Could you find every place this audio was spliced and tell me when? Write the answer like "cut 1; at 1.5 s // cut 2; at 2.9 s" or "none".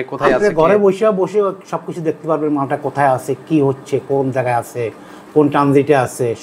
none